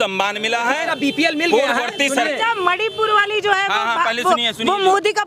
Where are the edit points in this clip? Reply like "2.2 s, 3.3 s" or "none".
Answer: none